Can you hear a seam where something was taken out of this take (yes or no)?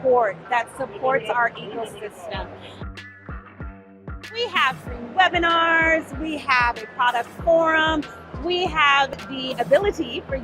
yes